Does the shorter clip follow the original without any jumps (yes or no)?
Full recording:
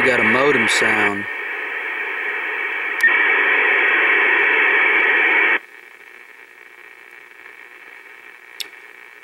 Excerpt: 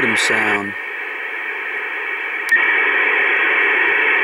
yes